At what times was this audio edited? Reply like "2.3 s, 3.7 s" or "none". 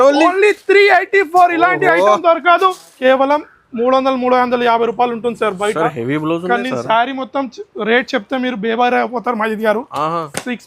2.9 s